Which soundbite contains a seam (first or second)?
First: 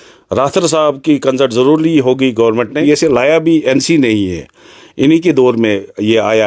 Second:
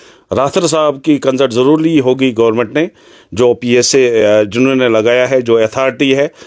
first